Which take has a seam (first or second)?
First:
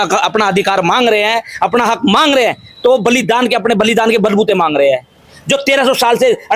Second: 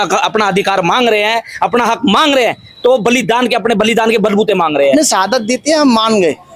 second